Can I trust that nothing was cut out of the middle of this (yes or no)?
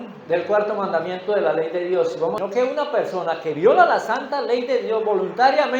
no